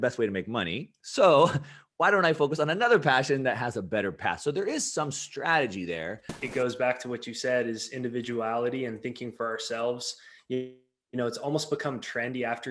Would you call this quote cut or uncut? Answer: cut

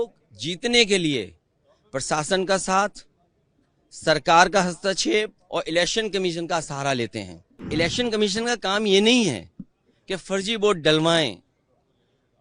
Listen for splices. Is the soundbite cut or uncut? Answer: cut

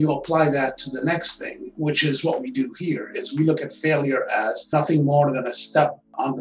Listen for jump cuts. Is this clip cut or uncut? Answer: uncut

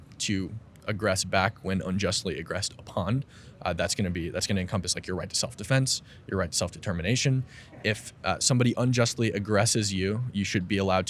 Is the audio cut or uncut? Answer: uncut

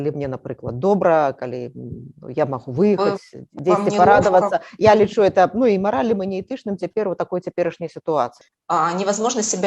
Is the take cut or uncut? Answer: cut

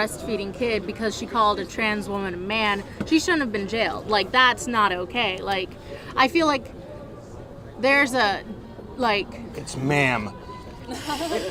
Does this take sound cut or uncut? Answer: uncut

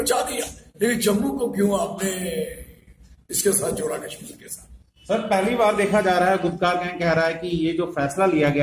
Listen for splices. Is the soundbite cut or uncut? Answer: uncut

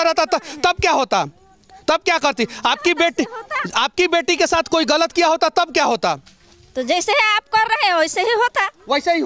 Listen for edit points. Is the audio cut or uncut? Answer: uncut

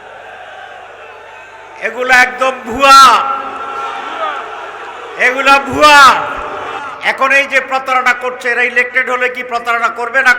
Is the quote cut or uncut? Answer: cut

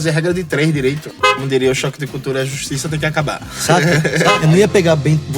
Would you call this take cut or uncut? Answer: cut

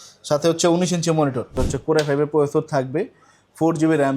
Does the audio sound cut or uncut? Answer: cut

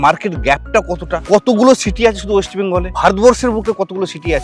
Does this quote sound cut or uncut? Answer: cut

